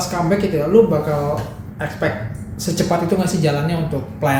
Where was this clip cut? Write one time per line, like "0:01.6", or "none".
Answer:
none